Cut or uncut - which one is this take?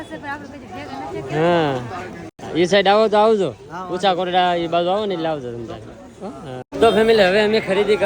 uncut